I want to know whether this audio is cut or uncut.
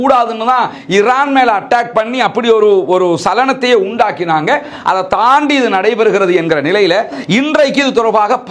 uncut